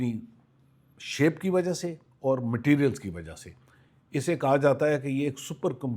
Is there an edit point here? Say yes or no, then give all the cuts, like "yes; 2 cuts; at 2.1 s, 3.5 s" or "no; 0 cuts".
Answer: no; 0 cuts